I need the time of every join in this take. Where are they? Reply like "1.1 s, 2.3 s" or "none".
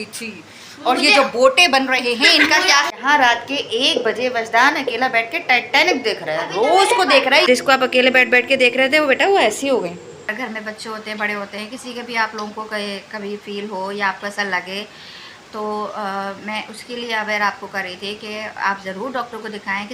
2.9 s, 7.5 s, 10.2 s